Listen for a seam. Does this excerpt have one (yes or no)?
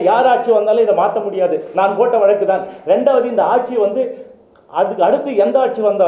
no